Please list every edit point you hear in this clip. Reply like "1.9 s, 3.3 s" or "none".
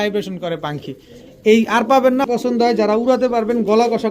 2.2 s